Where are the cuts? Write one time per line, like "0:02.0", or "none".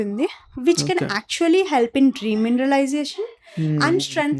none